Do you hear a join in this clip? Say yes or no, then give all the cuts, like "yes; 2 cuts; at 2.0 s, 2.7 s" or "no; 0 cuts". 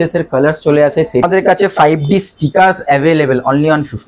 yes; 1 cut; at 1.1 s